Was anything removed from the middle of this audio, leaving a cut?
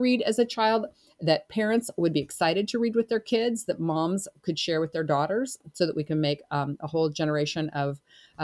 no; 0 cuts

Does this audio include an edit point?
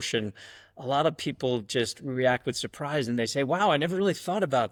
no; 0 cuts

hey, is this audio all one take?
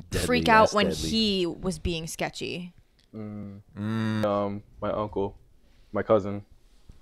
no; 1 cut; at 4.2 s

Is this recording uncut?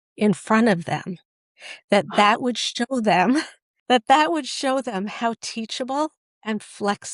yes; 0 cuts

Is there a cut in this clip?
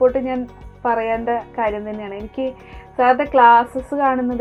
no; 0 cuts

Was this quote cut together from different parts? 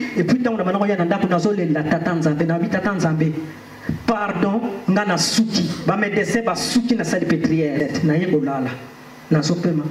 yes; 1 cut; at 7.8 s

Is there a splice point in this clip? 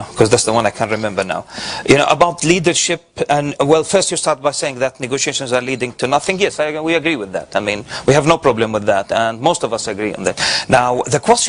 no; 0 cuts

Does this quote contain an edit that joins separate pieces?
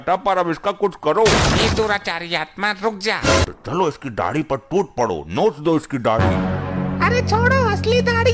yes; 1 cut; at 3.4 s

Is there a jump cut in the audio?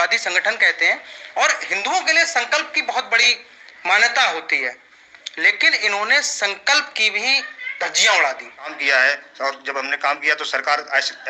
yes; 1 cut; at 8.8 s

